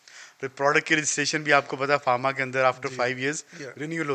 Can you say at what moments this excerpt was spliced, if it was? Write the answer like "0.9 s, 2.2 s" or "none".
none